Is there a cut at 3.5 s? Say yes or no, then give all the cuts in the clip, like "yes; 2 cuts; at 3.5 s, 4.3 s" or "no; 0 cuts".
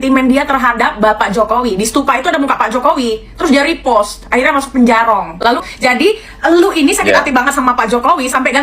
no; 1 cut; at 5.6 s